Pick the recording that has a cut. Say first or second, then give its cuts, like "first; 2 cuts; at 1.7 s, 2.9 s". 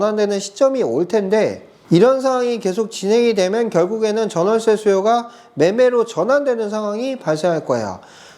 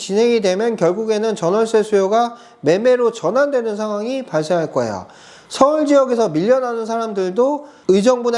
first; 1 cut; at 1.7 s